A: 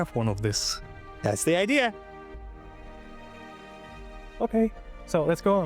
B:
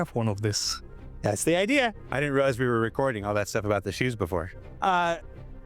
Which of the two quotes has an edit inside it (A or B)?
B